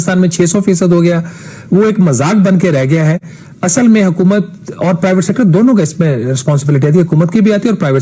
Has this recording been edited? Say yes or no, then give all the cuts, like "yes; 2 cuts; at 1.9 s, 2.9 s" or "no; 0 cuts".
no; 0 cuts